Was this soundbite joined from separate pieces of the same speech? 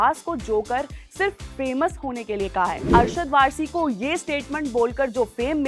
yes; 1 cut; at 2.9 s

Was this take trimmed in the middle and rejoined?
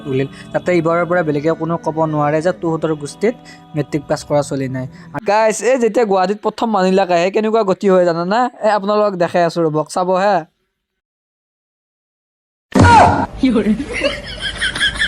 yes; 1 cut; at 5.0 s

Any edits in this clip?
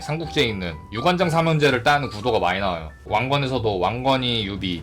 yes; 1 cut; at 3.1 s

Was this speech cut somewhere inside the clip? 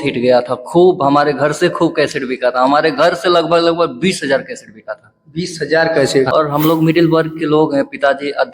yes; 1 cut; at 6.3 s

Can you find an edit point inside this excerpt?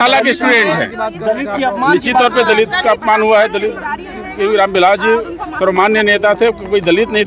no; 0 cuts

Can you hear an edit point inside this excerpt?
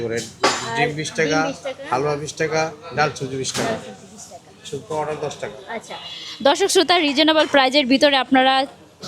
no; 0 cuts

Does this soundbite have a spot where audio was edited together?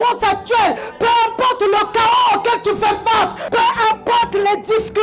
yes; 2 cuts; at 0.9 s, 3.4 s

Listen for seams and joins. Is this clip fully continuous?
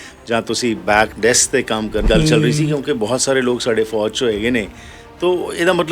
no; 1 cut; at 2.0 s

